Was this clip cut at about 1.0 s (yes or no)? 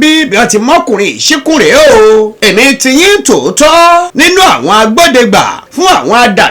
no